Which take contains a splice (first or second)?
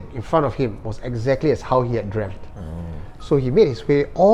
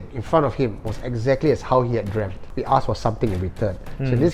second